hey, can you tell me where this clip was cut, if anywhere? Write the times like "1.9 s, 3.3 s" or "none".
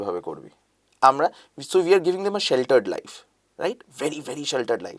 none